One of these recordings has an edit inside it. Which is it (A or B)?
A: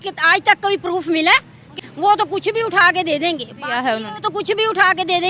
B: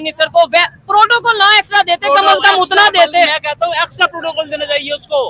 A